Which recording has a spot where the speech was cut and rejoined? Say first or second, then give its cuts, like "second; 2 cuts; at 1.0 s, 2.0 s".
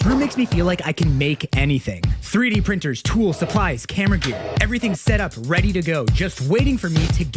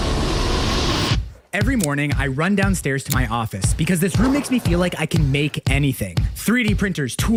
first; 1 cut; at 4.5 s